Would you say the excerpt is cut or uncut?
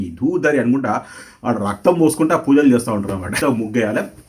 cut